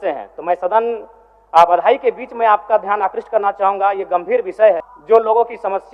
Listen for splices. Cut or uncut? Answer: cut